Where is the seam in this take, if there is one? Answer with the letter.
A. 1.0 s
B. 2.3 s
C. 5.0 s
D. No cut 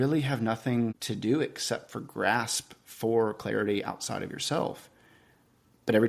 A